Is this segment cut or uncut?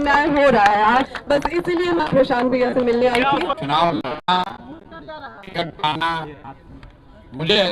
cut